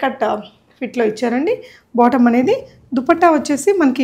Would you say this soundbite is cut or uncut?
uncut